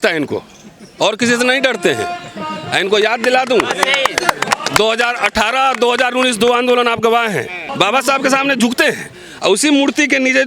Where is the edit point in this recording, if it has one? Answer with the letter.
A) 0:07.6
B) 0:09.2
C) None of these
A